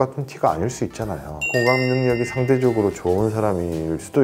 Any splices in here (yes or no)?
yes